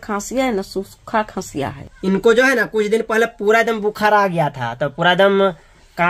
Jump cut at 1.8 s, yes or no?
yes